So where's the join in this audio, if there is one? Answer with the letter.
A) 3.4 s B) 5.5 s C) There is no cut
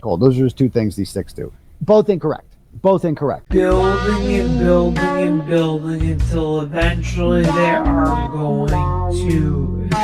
A